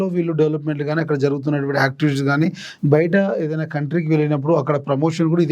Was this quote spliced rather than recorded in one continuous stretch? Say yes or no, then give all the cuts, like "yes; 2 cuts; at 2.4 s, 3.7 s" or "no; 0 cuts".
no; 0 cuts